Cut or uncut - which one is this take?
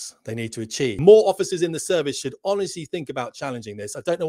cut